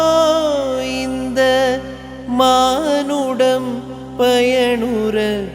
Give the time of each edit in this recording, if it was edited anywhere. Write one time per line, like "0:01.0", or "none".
none